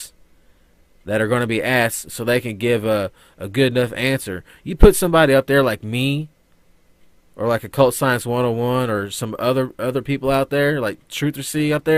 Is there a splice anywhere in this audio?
no; 0 cuts

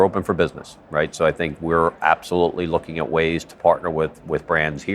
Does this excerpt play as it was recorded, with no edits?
yes; 0 cuts

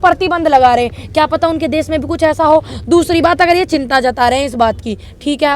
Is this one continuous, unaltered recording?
yes; 0 cuts

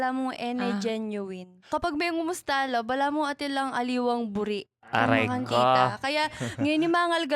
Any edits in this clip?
yes; 1 cut; at 1.6 s

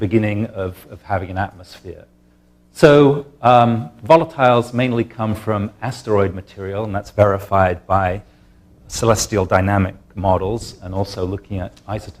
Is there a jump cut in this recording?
yes; 1 cut; at 1.7 s

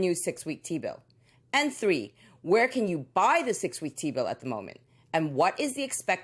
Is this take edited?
yes; 2 cuts; at 1.8 s, 4.8 s

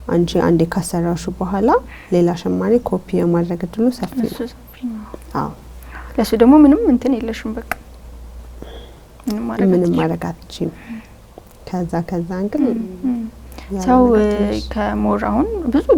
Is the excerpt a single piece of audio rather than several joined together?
yes; 0 cuts

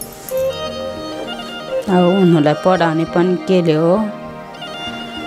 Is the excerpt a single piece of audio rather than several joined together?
no; 2 cuts; at 1.2 s, 4.2 s

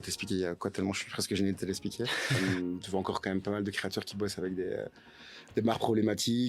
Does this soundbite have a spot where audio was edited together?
yes; 1 cut; at 2.6 s

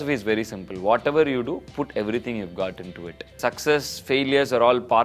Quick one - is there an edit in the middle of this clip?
yes; 1 cut; at 3.4 s

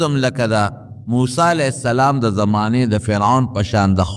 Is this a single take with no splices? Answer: yes; 0 cuts

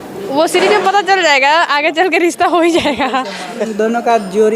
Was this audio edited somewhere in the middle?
yes; 1 cut; at 3.6 s

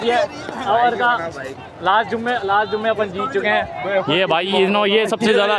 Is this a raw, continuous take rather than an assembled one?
yes; 0 cuts

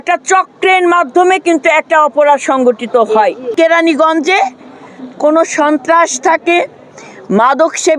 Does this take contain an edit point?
yes; 1 cut; at 3.5 s

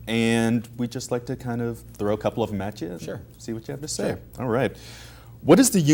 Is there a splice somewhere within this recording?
no; 0 cuts

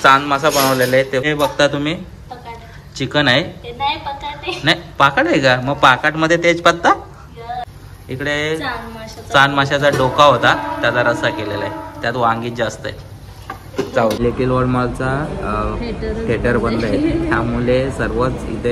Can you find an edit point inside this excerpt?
yes; 3 cuts; at 1.3 s, 7.8 s, 14.2 s

